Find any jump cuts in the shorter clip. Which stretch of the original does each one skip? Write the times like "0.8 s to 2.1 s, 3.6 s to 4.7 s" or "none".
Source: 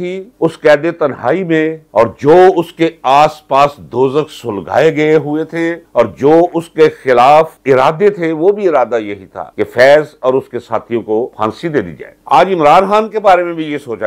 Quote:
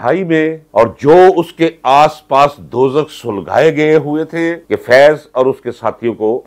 5.8 s to 9.5 s